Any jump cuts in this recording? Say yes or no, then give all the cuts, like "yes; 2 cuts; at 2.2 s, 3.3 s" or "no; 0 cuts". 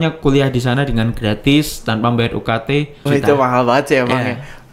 yes; 1 cut; at 3.0 s